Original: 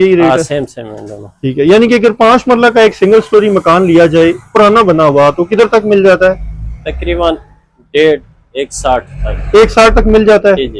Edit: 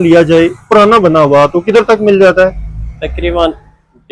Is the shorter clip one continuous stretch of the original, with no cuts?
yes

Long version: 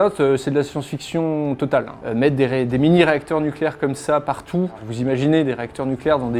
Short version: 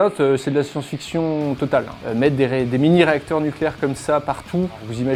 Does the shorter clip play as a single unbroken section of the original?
yes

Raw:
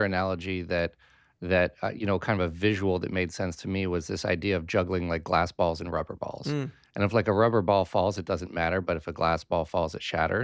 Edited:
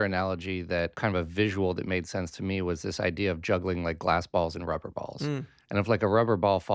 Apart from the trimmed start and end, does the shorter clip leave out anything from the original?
yes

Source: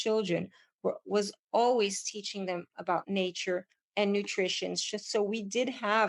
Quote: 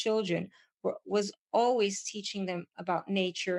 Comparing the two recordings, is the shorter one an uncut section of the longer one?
yes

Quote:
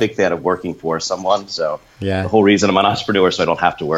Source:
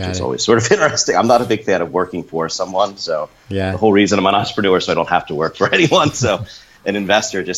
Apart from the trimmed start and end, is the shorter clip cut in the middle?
no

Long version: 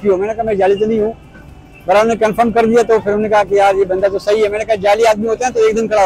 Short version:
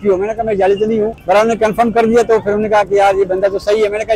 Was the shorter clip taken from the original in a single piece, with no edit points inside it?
no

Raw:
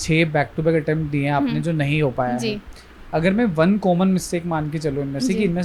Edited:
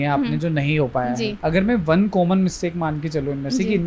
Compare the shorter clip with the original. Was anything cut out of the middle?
yes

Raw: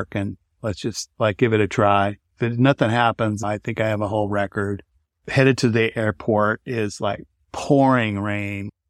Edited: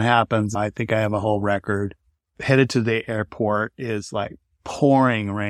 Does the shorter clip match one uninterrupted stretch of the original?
yes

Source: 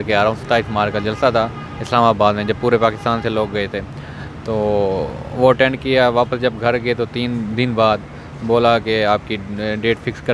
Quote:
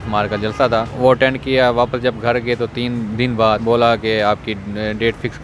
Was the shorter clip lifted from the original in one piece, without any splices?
no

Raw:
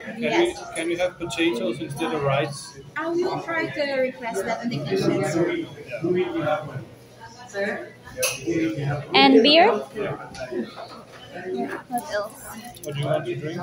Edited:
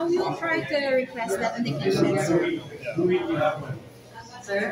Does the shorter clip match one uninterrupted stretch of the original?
yes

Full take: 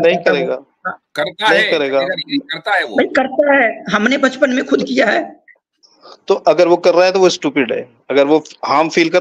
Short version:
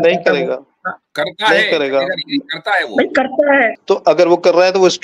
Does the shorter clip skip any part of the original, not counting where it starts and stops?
yes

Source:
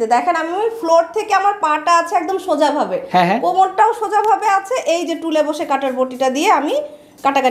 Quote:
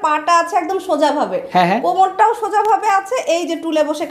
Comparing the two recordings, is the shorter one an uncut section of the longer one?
yes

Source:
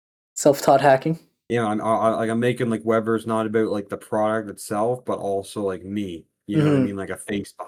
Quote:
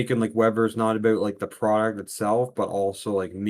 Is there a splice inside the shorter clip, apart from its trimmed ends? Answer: no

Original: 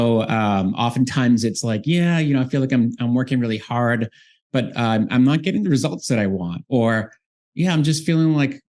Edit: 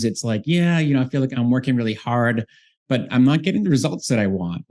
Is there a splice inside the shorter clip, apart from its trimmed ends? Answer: yes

